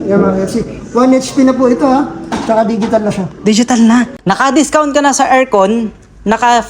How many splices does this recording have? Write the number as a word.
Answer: one